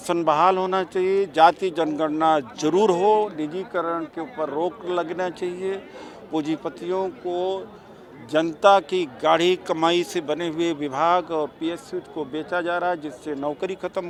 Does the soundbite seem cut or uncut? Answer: uncut